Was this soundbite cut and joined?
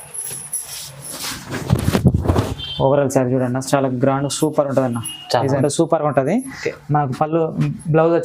yes; 1 cut; at 5.6 s

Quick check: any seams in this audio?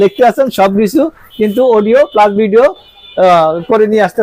no; 0 cuts

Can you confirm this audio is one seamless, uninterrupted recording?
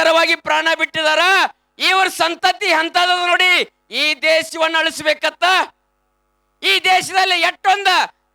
yes; 0 cuts

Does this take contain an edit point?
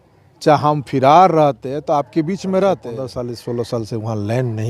yes; 1 cut; at 3.0 s

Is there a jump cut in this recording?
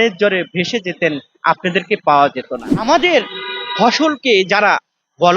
yes; 1 cut; at 2.8 s

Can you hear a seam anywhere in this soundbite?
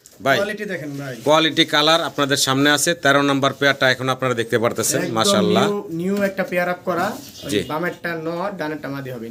no; 0 cuts

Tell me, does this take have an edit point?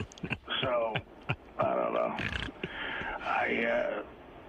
no; 0 cuts

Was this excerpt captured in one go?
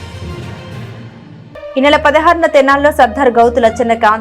no; 1 cut; at 1.3 s

